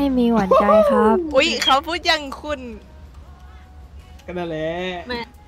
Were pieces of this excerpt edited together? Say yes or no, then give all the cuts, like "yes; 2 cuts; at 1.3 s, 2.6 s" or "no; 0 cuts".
no; 0 cuts